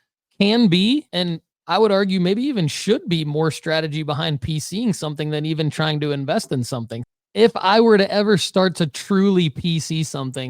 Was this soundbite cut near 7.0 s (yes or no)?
yes